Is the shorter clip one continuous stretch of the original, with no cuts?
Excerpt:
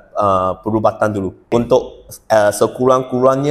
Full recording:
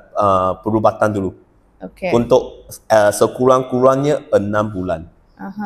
no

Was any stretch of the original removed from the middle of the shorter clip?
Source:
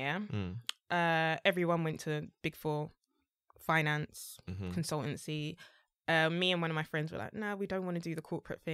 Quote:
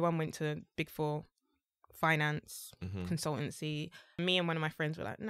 yes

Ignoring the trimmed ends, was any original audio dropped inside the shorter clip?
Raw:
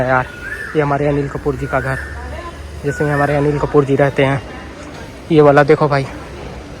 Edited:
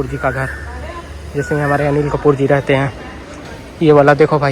no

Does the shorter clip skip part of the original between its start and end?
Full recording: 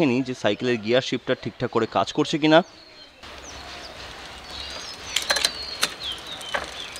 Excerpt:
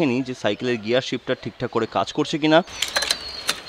yes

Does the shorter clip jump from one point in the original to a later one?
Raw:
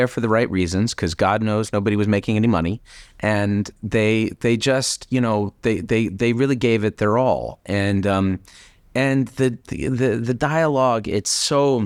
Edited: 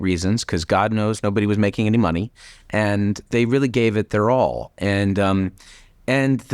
yes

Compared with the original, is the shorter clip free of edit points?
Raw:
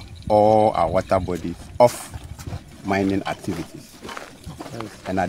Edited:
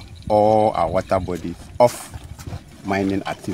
yes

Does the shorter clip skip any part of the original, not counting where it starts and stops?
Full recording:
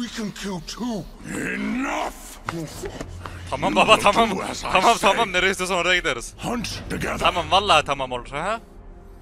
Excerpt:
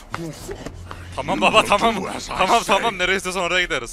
no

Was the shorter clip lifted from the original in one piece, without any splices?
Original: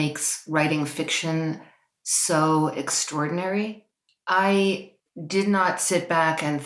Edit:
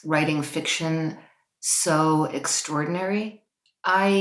yes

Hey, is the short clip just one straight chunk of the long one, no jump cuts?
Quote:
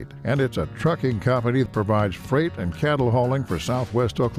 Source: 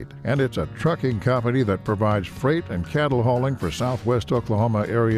no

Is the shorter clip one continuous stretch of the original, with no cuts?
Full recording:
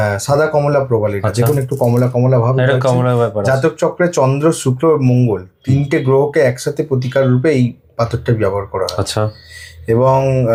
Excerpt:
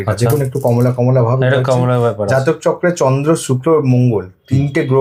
yes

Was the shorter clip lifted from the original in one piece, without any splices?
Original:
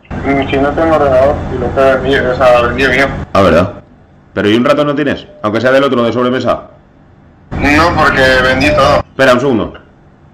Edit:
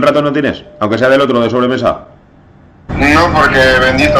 yes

